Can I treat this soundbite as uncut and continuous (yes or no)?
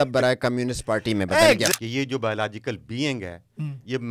no